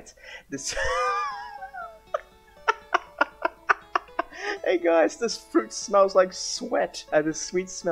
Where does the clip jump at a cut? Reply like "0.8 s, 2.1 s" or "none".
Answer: 7.0 s